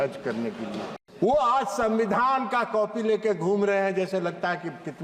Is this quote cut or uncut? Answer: cut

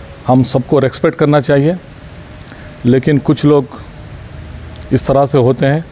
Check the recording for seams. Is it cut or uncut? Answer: uncut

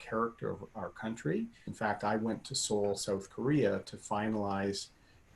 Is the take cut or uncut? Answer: cut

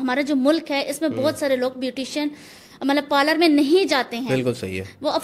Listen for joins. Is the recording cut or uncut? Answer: uncut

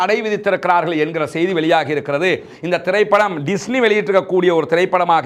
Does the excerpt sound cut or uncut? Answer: uncut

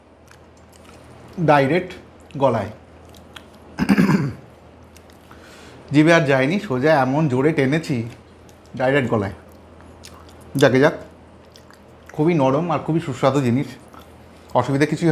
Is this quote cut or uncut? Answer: uncut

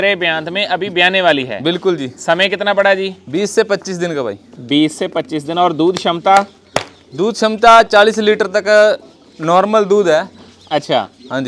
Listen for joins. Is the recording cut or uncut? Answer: uncut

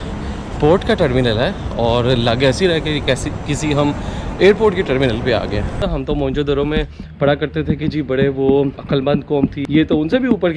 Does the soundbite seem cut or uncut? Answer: cut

